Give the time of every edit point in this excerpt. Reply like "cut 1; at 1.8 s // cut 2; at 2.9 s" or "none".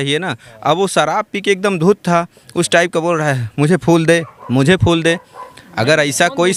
none